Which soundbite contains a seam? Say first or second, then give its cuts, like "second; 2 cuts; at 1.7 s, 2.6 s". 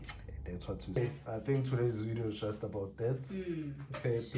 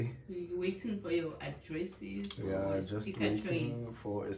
first; 1 cut; at 1.0 s